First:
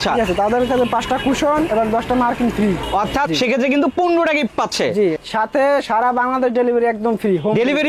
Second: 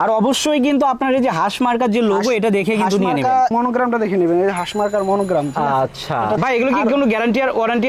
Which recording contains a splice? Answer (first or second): second